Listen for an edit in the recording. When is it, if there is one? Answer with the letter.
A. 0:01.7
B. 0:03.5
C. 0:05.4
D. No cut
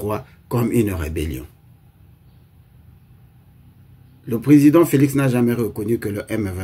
D